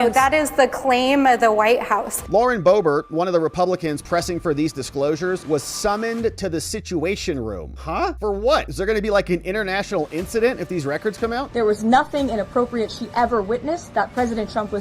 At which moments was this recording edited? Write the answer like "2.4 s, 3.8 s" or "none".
2.2 s, 11.5 s